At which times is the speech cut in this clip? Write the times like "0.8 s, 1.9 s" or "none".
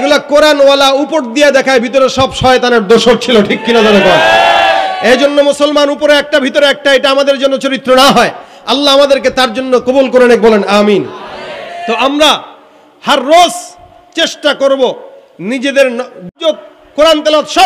none